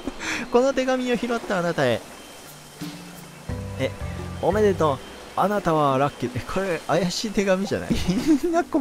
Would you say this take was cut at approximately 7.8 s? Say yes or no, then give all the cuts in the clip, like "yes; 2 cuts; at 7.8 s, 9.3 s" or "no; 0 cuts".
yes; 1 cut; at 7.8 s